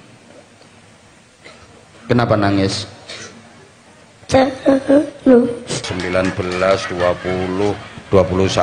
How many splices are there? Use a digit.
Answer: 1